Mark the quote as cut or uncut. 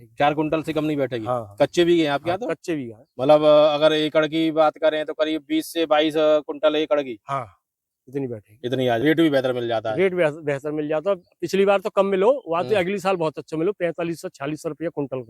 cut